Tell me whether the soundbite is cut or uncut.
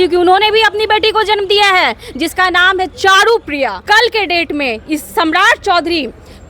cut